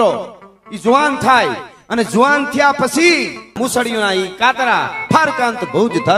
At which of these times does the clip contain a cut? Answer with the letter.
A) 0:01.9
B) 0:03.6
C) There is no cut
B